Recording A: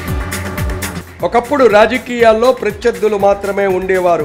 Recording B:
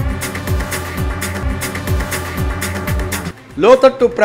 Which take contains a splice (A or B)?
A